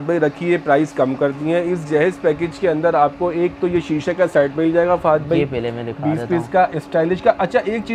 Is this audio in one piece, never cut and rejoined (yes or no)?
yes